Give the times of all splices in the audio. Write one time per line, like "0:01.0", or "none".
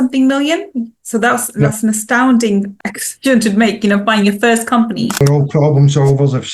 0:02.8
0:05.1